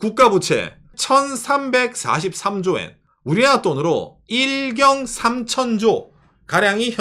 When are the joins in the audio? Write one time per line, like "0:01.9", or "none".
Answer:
0:00.9
0:03.0